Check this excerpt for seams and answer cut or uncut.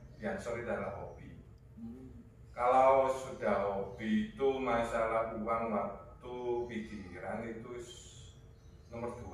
uncut